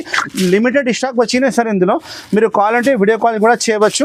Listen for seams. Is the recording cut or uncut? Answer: uncut